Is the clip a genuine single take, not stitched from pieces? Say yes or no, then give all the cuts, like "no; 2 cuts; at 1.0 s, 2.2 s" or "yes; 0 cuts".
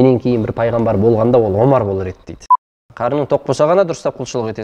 no; 1 cut; at 2.8 s